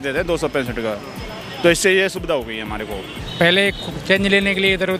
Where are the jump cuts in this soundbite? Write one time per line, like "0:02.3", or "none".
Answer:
0:03.1